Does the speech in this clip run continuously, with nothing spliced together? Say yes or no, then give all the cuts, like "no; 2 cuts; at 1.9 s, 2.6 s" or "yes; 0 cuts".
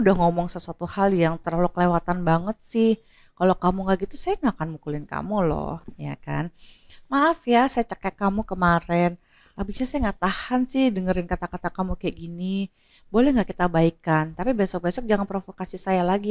yes; 0 cuts